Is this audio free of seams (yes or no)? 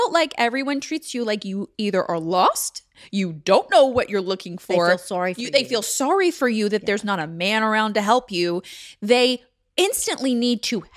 yes